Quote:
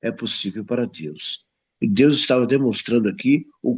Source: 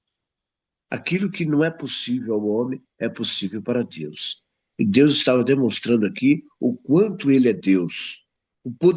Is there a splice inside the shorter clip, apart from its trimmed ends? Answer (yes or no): no